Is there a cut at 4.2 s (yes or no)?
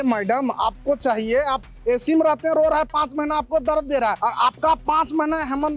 yes